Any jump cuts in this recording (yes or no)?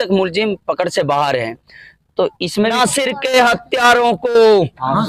yes